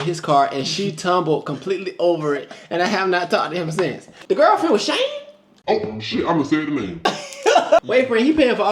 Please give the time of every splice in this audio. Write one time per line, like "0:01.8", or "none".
0:04.1
0:07.8